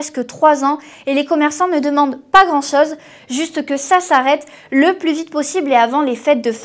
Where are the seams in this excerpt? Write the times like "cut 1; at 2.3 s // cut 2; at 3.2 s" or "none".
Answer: cut 1; at 0.9 s